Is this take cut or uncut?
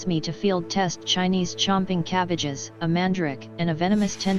uncut